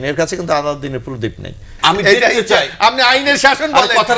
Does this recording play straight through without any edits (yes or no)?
no